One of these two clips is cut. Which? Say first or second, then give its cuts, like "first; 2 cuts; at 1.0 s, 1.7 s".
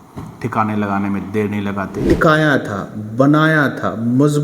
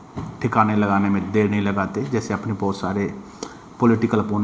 first; 1 cut; at 2.0 s